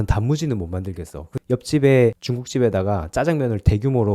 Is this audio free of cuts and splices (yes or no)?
no